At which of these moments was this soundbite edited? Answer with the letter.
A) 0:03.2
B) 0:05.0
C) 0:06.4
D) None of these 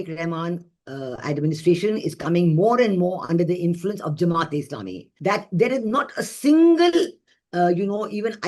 B